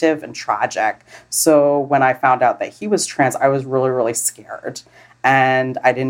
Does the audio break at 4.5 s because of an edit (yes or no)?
no